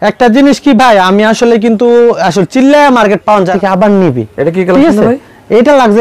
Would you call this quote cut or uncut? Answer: cut